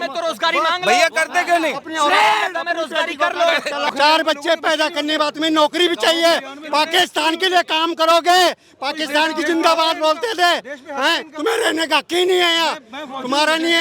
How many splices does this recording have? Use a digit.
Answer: 1